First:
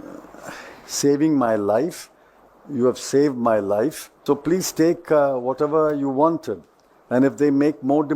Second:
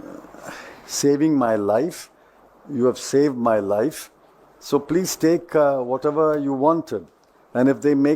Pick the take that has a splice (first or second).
first